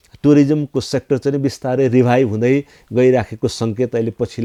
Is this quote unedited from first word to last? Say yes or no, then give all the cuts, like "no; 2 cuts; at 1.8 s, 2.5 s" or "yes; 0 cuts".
yes; 0 cuts